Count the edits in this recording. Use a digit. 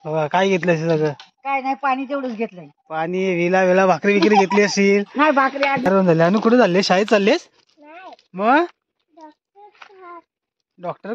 1